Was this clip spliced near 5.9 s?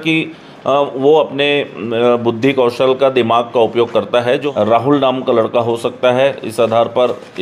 no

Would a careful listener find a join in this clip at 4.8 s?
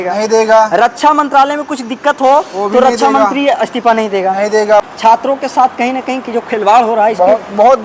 yes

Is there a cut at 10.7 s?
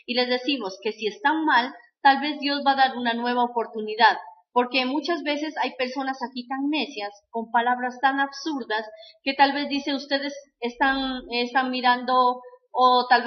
yes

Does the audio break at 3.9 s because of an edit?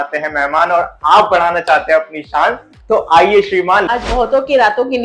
yes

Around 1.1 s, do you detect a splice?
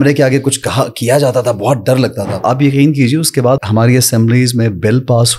no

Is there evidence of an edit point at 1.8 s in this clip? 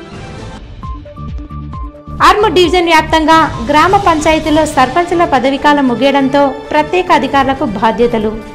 no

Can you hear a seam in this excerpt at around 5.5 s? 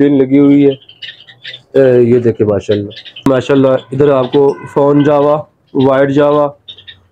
no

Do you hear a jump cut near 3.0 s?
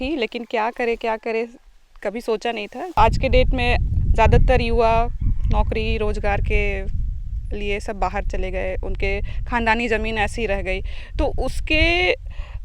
yes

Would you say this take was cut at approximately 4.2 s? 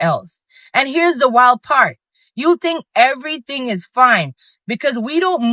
no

